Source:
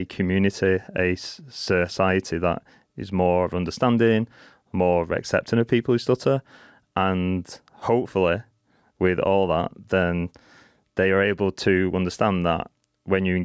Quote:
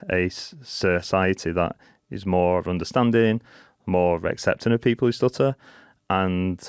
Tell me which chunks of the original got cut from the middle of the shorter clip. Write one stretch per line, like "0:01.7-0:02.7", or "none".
none